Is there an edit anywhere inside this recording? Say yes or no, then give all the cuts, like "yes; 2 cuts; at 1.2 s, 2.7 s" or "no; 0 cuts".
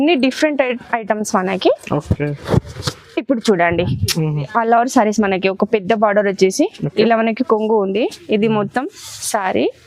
yes; 1 cut; at 4.4 s